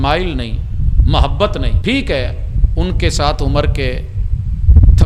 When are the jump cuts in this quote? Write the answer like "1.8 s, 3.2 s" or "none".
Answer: 1.7 s